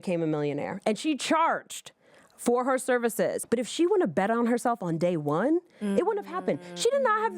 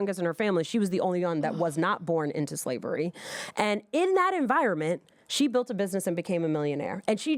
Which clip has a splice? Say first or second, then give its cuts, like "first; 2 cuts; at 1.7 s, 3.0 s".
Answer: first; 1 cut; at 3.4 s